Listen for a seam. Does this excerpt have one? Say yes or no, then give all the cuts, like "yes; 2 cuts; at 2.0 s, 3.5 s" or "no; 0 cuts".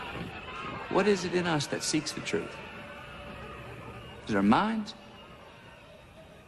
yes; 1 cut; at 4.8 s